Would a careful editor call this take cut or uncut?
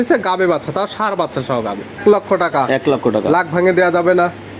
cut